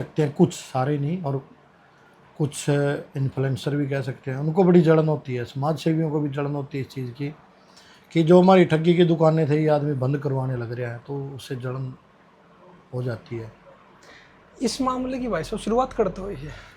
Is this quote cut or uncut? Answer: uncut